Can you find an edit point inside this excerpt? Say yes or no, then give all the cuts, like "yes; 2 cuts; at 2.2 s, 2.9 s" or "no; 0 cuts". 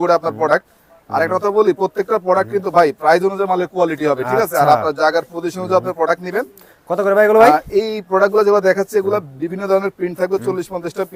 no; 0 cuts